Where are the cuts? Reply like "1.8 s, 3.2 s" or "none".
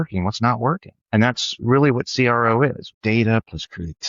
0.9 s, 2.9 s